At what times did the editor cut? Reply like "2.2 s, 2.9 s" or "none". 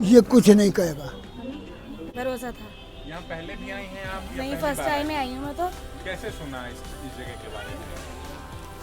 2.1 s